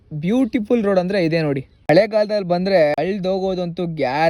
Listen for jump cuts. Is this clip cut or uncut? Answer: uncut